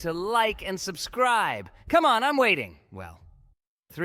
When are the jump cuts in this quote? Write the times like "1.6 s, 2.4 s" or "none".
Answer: none